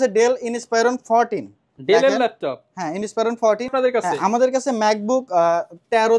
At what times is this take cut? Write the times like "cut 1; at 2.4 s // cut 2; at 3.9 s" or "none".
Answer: cut 1; at 3.7 s